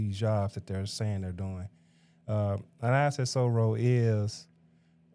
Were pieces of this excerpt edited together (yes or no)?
no